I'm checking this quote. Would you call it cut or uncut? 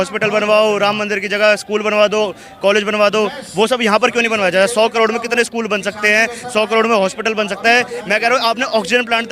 uncut